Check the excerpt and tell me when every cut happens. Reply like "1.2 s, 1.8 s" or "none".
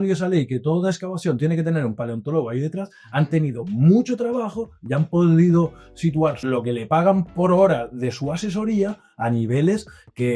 6.4 s